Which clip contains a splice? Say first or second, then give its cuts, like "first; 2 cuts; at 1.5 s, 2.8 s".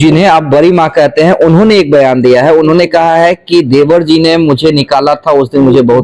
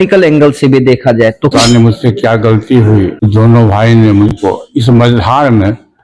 second; 1 cut; at 1.5 s